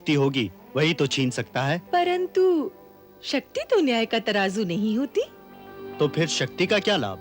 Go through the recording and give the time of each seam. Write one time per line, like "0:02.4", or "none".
0:01.8